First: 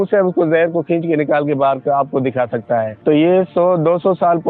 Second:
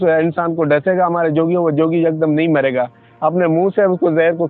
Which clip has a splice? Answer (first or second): first